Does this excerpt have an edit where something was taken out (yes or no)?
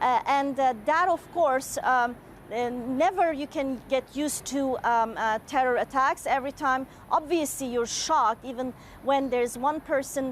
yes